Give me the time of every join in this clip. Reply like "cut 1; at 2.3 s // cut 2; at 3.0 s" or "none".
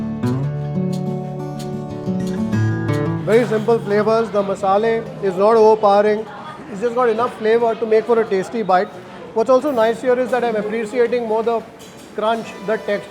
none